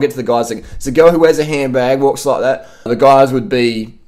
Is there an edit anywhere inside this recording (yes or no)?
yes